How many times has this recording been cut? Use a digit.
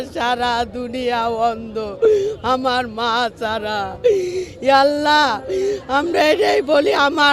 0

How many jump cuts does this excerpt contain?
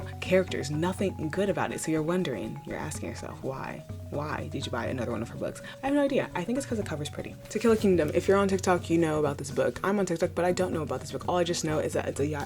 1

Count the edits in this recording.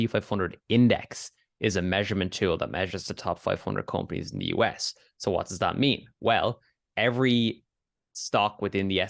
0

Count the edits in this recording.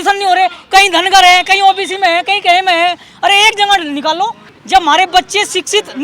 1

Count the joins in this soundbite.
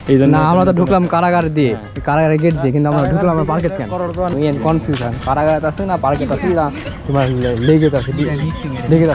1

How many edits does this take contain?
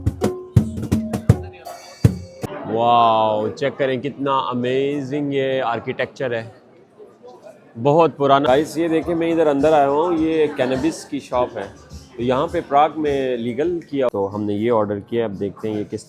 3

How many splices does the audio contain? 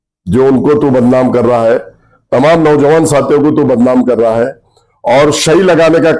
0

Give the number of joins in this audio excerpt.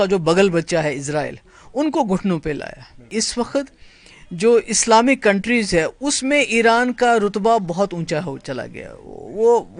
1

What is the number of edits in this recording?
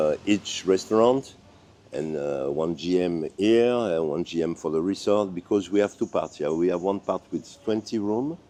0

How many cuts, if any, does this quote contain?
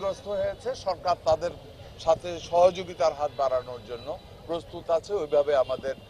0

